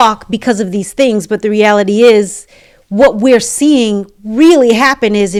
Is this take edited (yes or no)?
no